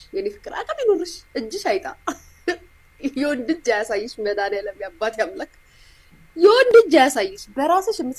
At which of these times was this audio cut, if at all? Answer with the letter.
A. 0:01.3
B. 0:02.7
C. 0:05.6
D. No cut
D